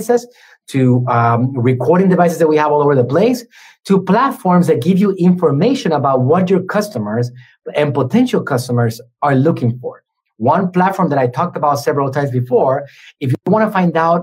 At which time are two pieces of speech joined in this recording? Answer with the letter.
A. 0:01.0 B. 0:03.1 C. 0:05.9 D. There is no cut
D